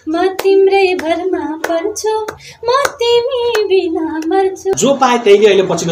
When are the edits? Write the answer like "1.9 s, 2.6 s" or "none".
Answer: 4.7 s